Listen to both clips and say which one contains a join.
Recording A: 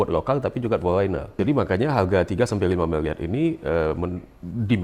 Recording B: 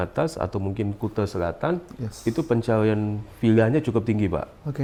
A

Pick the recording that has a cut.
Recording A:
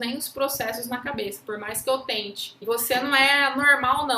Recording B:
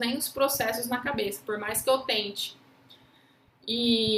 A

